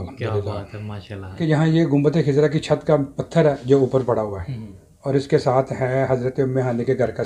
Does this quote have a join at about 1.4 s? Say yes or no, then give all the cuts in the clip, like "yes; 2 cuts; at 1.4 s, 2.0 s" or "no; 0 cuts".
yes; 1 cut; at 1.4 s